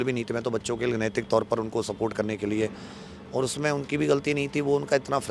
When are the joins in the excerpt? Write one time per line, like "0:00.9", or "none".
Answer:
none